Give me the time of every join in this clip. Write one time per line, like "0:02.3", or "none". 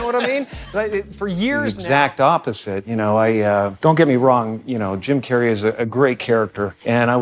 0:01.7